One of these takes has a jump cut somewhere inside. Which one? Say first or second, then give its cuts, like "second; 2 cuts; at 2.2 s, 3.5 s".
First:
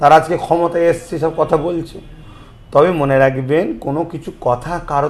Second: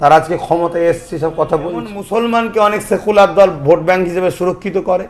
second; 1 cut; at 2.0 s